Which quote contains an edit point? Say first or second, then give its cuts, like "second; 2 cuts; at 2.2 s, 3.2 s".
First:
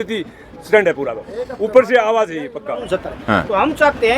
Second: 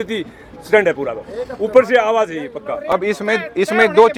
first; 1 cut; at 2.8 s